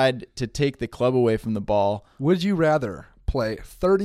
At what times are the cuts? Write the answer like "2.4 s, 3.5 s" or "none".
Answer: 2.1 s, 3.0 s